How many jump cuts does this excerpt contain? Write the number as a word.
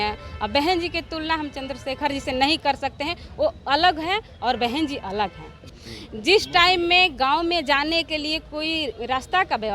one